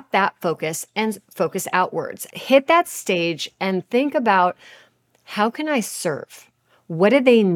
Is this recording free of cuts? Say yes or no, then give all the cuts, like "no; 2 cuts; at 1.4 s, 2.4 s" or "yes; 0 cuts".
no; 1 cut; at 2.2 s